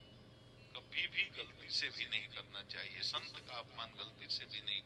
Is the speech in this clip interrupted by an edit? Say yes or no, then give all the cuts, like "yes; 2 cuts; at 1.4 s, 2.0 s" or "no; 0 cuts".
no; 0 cuts